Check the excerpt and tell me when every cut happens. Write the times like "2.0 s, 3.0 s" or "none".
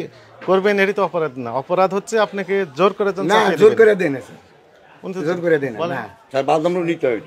none